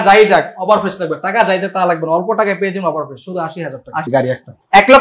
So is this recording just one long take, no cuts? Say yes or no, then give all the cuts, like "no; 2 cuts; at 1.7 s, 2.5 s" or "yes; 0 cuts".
no; 1 cut; at 4.1 s